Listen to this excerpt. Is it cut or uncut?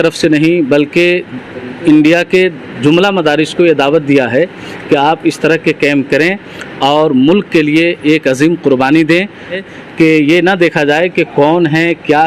cut